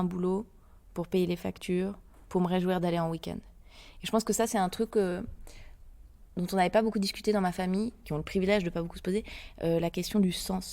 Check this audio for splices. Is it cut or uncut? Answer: cut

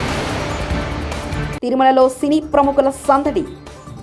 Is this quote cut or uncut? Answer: cut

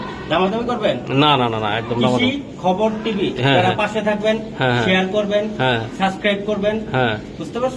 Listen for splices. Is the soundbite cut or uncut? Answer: uncut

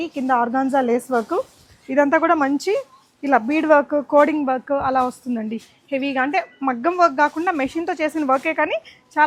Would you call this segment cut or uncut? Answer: uncut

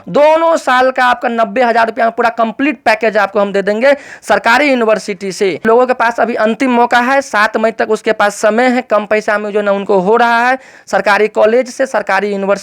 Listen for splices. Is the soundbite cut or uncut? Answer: cut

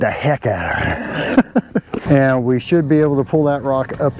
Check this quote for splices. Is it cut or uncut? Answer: cut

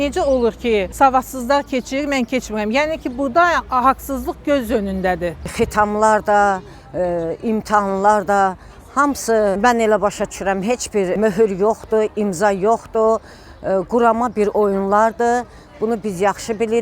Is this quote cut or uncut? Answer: cut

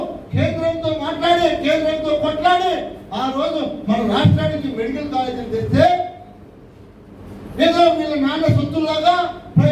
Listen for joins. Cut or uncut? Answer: uncut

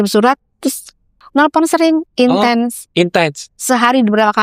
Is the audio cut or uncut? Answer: cut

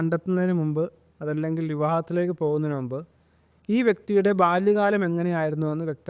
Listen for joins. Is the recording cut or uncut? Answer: uncut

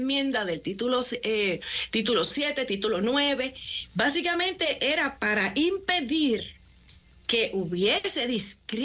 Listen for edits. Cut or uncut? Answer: uncut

